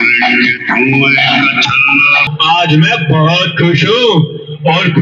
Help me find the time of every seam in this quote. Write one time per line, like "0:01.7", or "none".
0:02.0